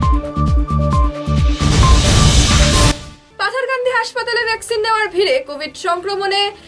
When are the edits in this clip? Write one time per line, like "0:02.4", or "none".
0:02.9